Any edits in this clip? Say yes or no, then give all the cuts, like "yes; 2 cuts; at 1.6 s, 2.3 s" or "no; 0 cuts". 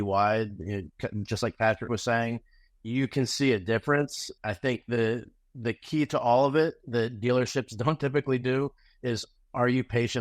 yes; 1 cut; at 4.2 s